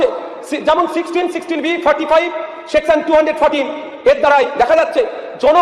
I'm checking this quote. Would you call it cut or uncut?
uncut